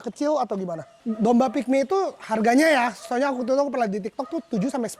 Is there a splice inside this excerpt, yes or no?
yes